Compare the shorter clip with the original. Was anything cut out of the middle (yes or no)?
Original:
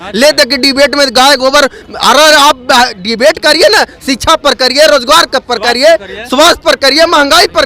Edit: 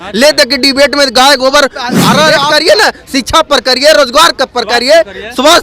yes